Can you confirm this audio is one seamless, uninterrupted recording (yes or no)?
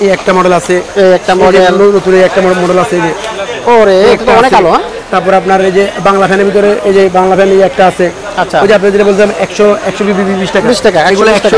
yes